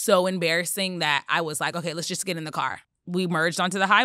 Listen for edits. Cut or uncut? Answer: cut